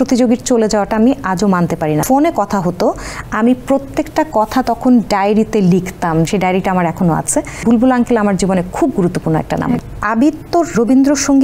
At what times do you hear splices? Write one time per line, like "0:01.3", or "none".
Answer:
0:02.0
0:06.3
0:07.6
0:09.9
0:10.7